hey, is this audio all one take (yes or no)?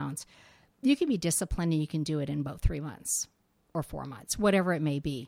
yes